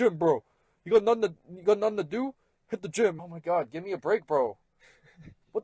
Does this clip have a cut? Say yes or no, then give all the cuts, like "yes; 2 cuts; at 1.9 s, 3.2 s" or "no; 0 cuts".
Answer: yes; 1 cut; at 3.2 s